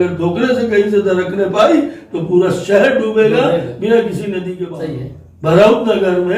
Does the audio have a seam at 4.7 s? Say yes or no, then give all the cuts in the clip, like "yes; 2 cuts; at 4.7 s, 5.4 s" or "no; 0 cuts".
yes; 1 cut; at 4.7 s